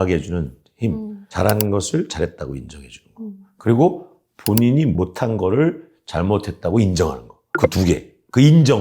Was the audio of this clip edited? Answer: yes; 1 cut; at 1.2 s

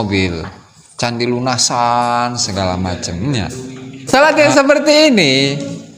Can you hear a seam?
yes; 1 cut; at 4.0 s

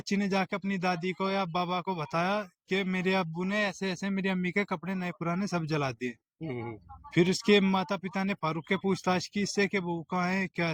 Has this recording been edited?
no; 0 cuts

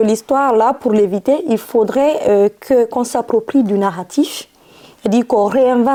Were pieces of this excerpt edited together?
no; 0 cuts

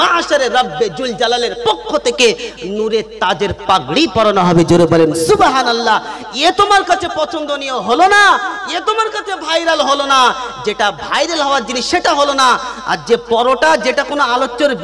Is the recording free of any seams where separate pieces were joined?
yes; 0 cuts

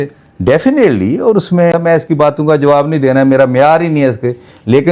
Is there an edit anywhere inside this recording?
yes; 1 cut; at 1.7 s

